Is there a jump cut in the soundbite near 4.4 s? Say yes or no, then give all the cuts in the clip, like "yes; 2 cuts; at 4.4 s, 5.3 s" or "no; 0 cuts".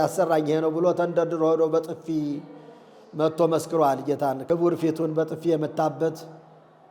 yes; 1 cut; at 4.4 s